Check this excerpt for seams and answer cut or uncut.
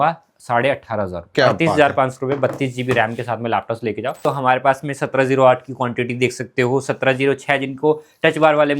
cut